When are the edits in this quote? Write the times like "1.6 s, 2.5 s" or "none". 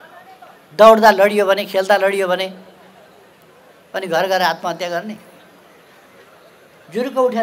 none